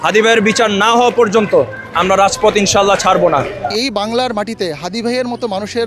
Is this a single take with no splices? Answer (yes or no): no